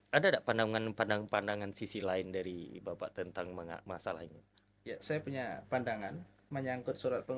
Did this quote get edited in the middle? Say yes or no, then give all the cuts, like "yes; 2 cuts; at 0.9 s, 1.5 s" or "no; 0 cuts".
yes; 1 cut; at 6.4 s